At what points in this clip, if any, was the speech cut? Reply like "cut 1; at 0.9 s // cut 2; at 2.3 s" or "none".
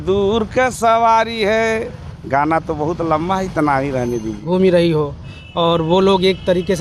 cut 1; at 4.4 s